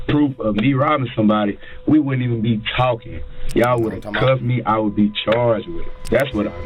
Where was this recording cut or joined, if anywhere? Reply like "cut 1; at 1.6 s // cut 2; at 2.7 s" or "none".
cut 1; at 5.6 s